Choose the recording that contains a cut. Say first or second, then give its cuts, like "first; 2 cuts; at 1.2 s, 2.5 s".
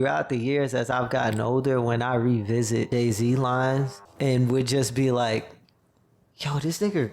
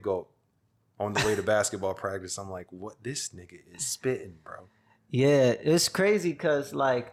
first; 2 cuts; at 2.9 s, 4.0 s